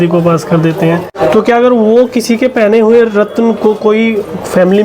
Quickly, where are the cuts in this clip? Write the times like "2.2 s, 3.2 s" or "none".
1.1 s

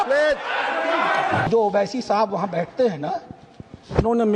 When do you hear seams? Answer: 1.5 s

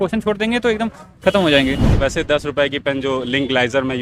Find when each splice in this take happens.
1.9 s

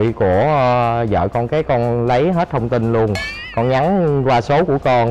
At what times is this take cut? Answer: none

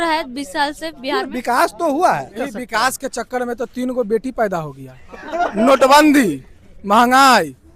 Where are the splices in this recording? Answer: none

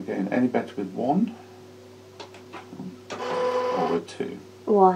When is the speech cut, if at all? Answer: none

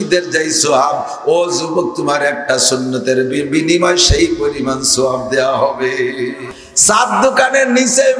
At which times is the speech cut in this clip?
6.4 s

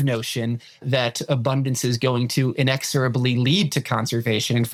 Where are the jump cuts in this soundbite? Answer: none

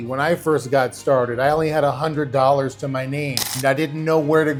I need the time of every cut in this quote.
none

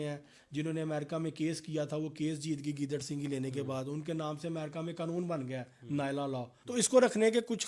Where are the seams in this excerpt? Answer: 6.6 s

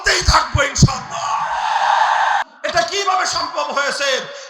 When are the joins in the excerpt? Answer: 2.4 s

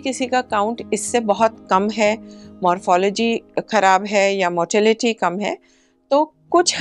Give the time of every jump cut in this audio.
none

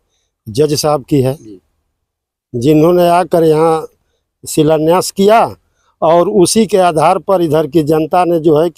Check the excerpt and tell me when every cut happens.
none

